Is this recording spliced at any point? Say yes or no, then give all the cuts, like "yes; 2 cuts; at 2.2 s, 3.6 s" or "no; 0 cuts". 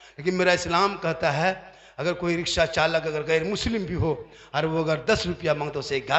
no; 0 cuts